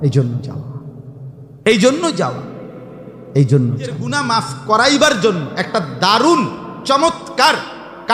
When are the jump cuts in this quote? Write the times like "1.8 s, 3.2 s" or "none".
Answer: 4.1 s